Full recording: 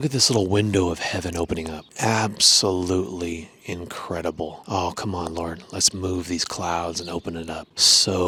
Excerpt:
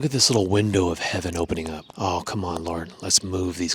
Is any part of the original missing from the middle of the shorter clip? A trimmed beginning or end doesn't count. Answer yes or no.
yes